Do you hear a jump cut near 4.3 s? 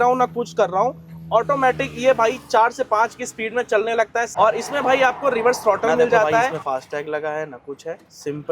yes; 2 cuts; at 4.3 s, 6.6 s

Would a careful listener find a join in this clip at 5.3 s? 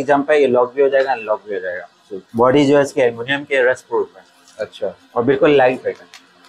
no; 1 cut; at 2.2 s

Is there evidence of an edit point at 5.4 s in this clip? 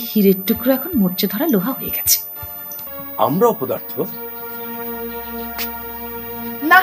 no; 1 cut; at 2.9 s

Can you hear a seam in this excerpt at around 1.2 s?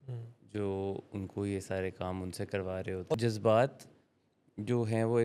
no; 1 cut; at 3.1 s

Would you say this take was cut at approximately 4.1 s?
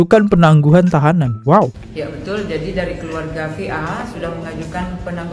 no; 1 cut; at 1.8 s

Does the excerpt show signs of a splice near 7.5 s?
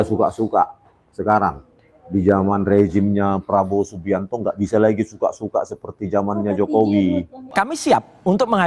yes; 1 cut; at 7.5 s

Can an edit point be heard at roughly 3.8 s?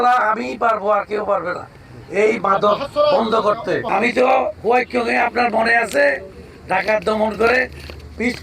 yes; 1 cut; at 3.8 s

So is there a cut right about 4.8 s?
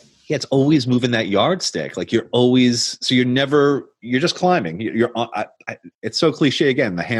no; 0 cuts

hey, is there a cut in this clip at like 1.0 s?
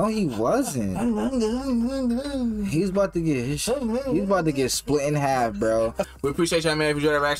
no; 1 cut; at 6.1 s

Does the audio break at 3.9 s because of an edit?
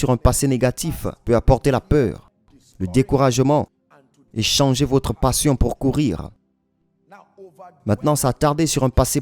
no; 1 cut; at 1.1 s

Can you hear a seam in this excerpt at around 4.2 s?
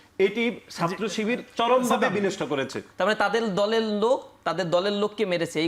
no; 1 cut; at 2.8 s

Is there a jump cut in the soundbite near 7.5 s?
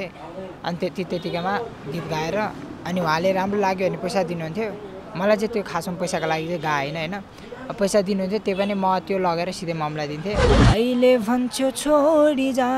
no; 1 cut; at 10.5 s

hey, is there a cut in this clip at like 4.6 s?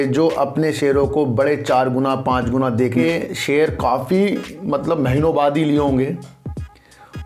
no; 1 cut; at 2.9 s

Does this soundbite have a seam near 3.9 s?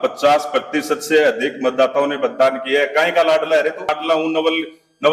yes; 1 cut; at 3.9 s

